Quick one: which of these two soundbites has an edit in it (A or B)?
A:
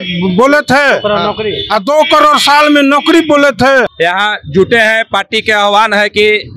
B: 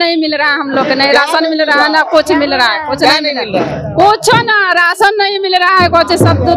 A